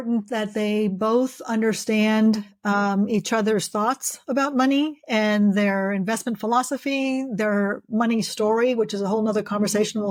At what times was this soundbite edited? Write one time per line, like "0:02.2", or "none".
none